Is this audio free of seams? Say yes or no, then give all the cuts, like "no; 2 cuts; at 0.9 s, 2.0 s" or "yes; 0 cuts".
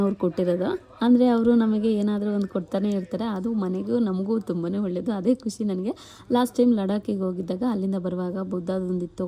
yes; 0 cuts